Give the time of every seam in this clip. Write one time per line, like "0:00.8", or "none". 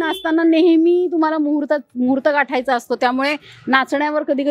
none